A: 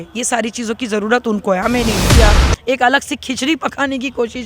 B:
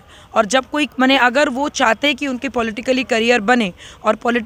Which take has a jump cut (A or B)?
A